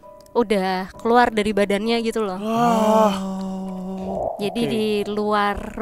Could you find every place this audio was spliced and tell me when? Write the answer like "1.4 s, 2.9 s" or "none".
4.2 s